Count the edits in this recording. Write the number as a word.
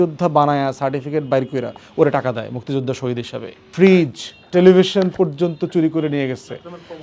one